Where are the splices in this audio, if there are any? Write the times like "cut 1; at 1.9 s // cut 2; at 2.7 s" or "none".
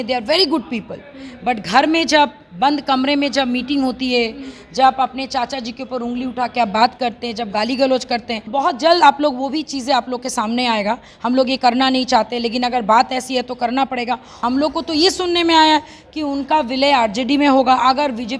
cut 1; at 8.4 s // cut 2; at 14.3 s